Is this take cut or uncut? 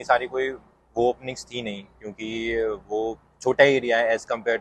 uncut